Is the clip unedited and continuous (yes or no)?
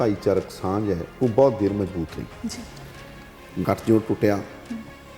yes